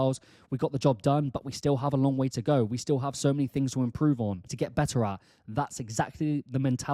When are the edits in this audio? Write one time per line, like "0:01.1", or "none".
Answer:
0:04.5